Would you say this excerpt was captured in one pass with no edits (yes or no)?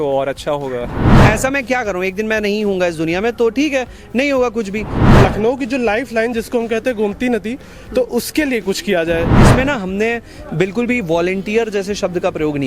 no